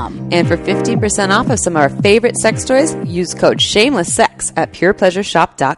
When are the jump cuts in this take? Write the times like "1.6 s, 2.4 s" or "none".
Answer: none